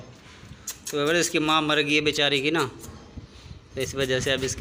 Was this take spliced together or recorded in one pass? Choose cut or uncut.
uncut